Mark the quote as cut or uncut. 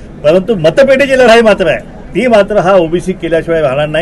uncut